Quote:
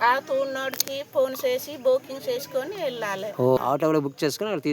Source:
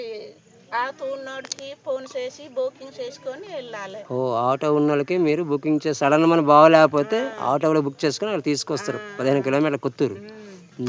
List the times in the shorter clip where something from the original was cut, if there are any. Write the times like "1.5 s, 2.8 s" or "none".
3.6 s